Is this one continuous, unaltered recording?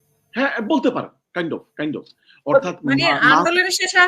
yes; 0 cuts

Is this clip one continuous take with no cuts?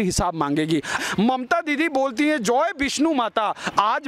no; 1 cut; at 1.0 s

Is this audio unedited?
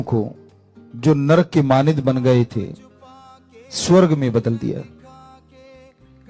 no; 1 cut; at 4.8 s

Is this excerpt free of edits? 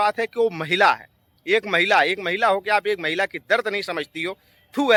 yes; 0 cuts

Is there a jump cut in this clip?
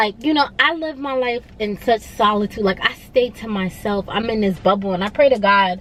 no; 0 cuts

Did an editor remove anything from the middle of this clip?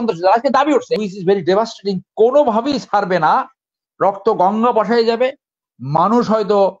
yes; 1 cut; at 1.0 s

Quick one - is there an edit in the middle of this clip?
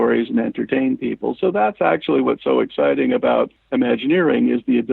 yes; 1 cut; at 3.6 s

